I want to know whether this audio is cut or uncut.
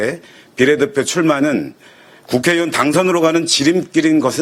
uncut